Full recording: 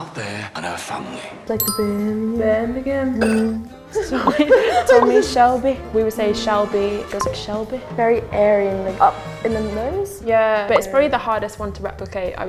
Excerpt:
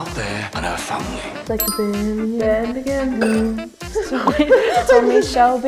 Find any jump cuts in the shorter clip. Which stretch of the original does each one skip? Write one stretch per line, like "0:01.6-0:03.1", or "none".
none